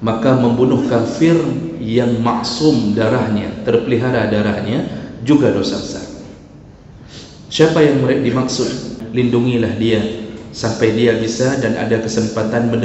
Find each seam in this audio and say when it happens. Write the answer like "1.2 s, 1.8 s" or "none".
9.0 s